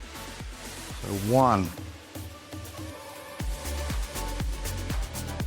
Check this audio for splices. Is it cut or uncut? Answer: cut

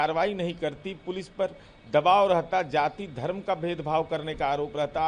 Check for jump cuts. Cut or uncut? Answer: uncut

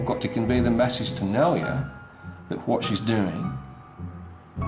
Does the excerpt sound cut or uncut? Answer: uncut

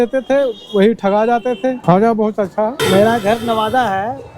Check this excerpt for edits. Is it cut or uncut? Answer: cut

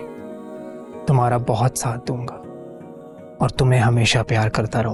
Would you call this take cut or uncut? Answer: uncut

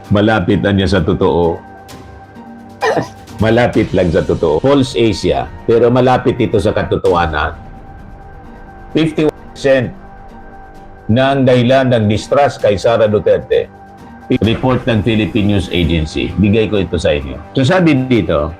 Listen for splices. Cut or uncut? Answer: cut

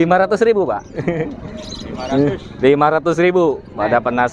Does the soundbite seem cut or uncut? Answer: uncut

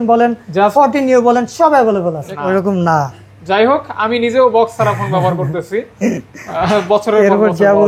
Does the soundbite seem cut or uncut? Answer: cut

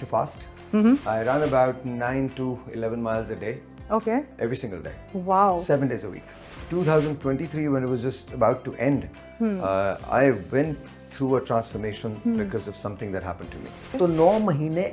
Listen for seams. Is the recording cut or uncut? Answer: cut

